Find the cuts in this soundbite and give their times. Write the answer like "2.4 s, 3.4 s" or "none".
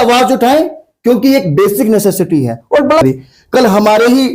3.0 s